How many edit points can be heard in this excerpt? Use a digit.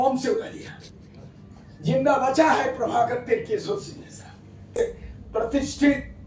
1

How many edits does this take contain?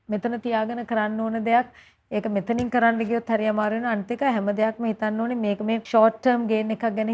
1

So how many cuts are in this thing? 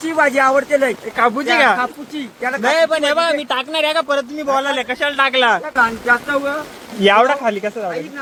0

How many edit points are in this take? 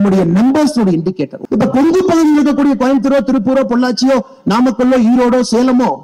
1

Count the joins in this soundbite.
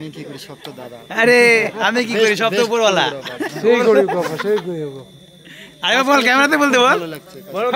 0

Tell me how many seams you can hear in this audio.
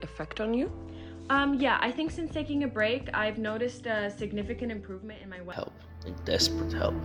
1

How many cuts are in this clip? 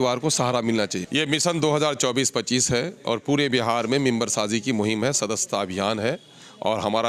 1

